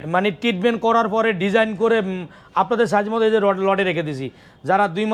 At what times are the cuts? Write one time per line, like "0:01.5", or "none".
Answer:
none